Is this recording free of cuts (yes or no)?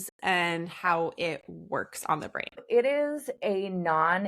no